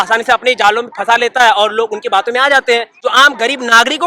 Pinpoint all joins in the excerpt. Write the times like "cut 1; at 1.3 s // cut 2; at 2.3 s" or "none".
cut 1; at 2.9 s